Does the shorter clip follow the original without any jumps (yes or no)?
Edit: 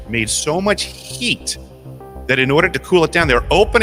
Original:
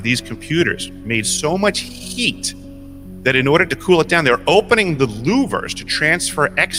yes